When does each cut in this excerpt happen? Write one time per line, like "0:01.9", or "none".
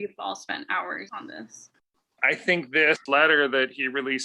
0:01.1
0:02.1
0:03.0